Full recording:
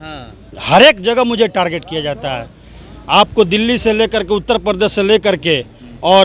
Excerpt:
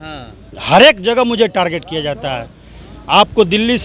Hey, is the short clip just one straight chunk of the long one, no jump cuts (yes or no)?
yes